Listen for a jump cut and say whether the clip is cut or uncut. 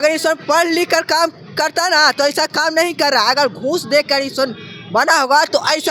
uncut